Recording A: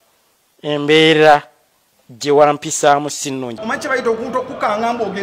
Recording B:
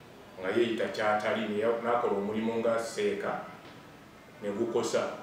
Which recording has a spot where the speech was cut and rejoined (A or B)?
A